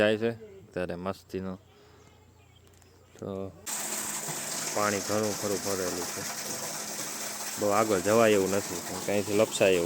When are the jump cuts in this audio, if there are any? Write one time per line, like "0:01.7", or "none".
0:03.7